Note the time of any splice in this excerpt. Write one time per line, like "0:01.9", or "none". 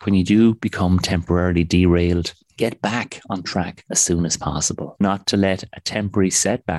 0:05.0